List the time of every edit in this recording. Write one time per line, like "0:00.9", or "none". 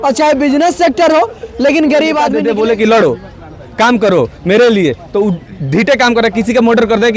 0:02.4

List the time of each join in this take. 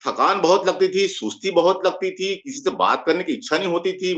none

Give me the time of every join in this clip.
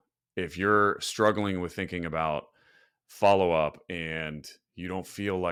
none

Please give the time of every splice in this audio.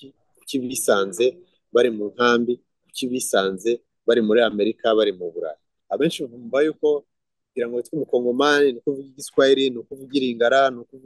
0:05.8

